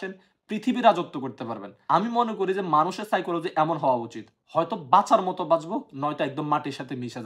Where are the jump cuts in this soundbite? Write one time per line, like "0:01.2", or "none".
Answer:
0:01.7